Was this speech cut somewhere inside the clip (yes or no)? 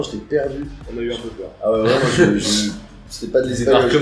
no